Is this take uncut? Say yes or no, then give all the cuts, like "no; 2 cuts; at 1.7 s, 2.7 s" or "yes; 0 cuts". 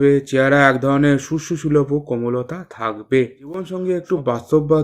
no; 1 cut; at 3.6 s